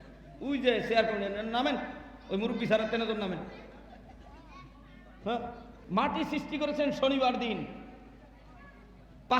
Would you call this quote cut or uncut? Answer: cut